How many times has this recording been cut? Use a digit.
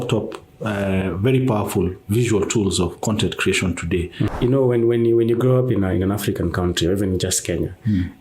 1